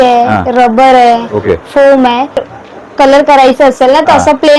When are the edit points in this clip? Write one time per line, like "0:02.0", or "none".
0:02.5